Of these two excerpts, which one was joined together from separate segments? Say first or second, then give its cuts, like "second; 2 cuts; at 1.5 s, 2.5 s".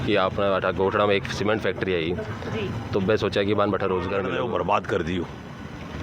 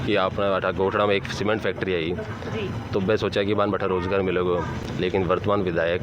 first; 1 cut; at 4.3 s